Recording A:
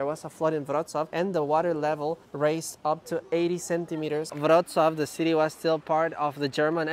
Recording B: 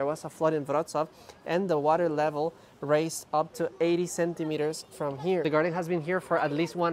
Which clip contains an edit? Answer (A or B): A